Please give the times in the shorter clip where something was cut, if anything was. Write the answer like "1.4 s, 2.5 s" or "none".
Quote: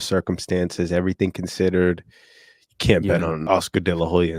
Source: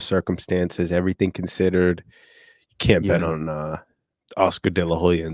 3.4 s